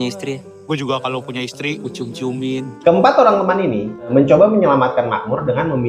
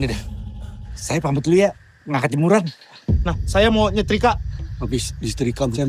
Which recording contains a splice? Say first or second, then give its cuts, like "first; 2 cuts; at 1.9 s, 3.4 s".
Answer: first; 2 cuts; at 2.7 s, 4.1 s